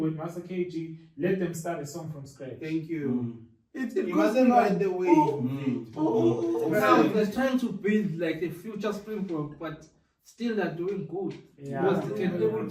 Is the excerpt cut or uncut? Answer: cut